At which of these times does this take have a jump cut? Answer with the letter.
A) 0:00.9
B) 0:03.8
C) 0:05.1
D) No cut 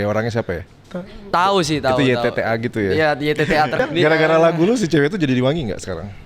B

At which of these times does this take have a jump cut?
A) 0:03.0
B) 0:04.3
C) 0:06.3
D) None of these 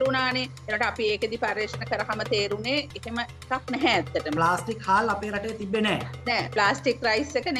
B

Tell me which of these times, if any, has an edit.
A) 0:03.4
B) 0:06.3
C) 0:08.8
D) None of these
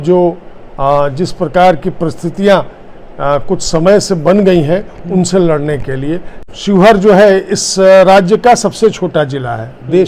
B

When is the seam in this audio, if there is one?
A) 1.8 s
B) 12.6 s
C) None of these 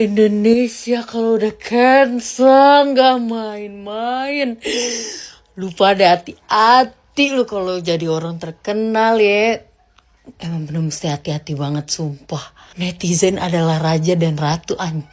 B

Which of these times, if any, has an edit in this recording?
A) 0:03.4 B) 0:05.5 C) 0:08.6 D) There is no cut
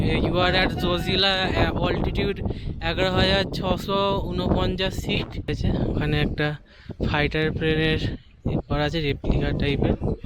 B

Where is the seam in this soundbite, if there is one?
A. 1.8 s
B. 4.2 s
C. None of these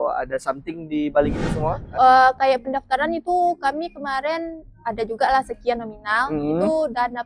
A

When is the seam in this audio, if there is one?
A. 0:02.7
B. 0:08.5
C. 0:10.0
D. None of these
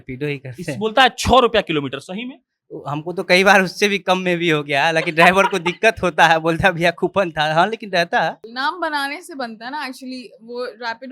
B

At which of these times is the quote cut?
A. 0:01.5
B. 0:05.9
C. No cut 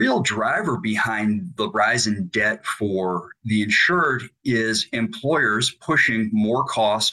A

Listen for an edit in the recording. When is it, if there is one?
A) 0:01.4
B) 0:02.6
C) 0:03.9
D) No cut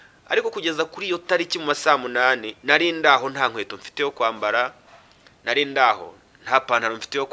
D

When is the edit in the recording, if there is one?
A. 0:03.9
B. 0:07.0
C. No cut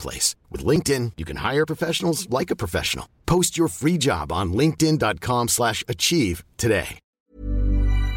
B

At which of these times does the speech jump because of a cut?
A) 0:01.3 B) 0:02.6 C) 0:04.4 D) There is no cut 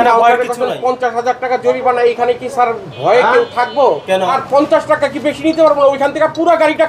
C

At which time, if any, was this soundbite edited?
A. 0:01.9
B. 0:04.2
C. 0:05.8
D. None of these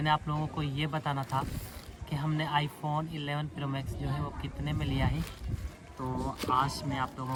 D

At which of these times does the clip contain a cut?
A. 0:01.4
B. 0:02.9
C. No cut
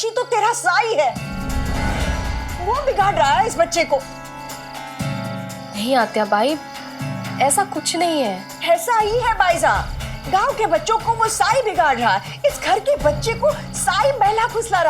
A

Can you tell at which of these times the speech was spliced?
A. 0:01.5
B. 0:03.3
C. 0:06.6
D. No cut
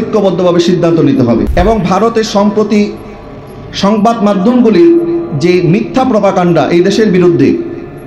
A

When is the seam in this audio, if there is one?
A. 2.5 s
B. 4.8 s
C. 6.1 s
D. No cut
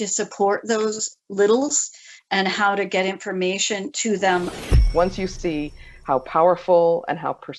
B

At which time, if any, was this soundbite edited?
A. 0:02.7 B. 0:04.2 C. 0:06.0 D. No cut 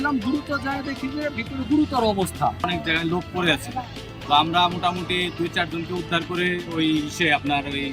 A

